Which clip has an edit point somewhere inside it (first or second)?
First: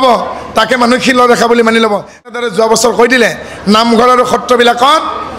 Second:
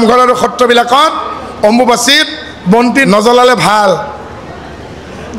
first